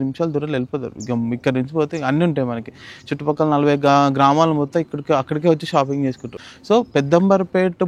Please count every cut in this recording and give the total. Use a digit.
1